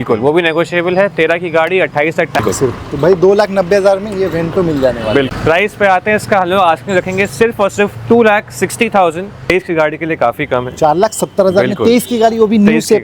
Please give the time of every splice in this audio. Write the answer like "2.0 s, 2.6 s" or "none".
2.4 s, 5.3 s, 9.4 s